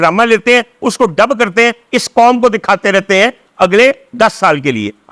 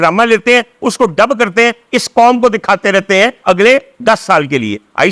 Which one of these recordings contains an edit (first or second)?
second